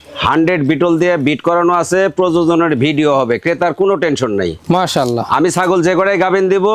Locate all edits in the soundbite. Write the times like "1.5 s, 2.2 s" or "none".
none